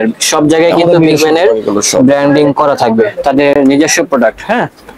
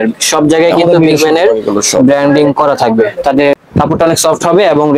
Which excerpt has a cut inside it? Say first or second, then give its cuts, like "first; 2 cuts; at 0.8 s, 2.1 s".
second; 1 cut; at 3.5 s